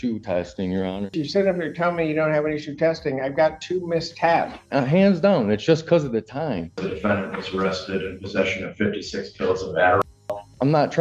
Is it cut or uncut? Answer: cut